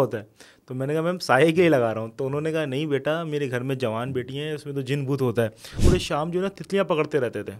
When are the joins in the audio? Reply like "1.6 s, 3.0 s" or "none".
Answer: 5.8 s